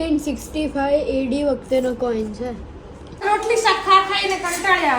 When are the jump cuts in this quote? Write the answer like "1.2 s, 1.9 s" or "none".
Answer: 3.2 s